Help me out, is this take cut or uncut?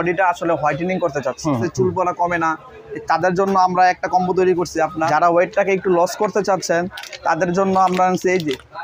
cut